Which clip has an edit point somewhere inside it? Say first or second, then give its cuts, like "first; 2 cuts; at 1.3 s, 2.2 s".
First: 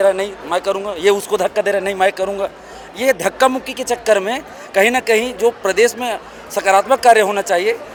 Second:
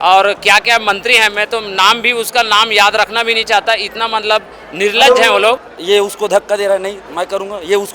second; 1 cut; at 5.7 s